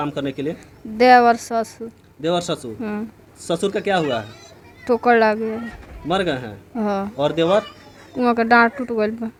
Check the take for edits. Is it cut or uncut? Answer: uncut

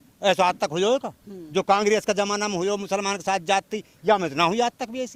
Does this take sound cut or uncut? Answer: uncut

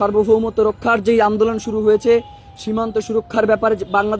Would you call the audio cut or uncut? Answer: uncut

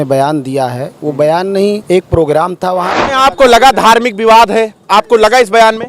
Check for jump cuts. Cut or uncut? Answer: cut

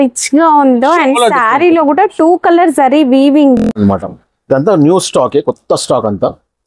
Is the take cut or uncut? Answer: cut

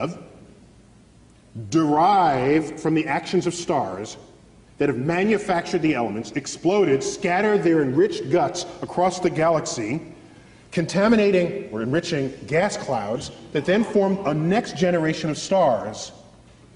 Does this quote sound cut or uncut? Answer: cut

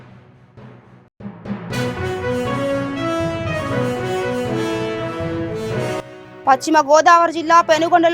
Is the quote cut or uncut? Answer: uncut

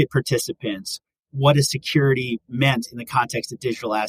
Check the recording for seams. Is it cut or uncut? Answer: uncut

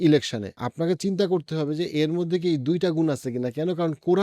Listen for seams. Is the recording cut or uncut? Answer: uncut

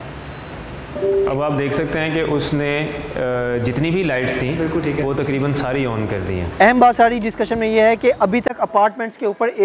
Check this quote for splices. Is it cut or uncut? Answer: cut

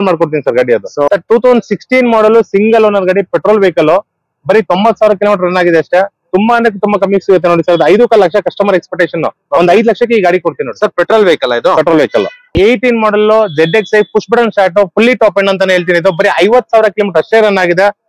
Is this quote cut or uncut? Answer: cut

